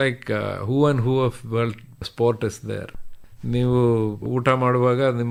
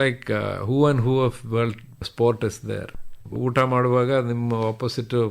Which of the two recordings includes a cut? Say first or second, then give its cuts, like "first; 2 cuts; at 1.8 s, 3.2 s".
second; 1 cut; at 3.3 s